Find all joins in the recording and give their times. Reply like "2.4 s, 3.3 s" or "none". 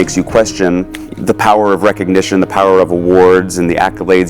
1.0 s